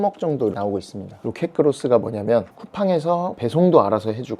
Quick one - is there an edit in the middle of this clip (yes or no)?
yes